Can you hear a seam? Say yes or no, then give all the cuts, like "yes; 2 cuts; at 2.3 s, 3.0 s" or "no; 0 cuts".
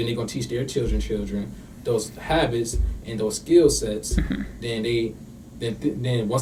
no; 0 cuts